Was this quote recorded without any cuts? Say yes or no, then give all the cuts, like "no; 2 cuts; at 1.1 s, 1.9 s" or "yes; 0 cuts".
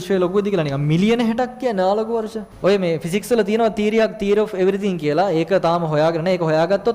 no; 1 cut; at 2.4 s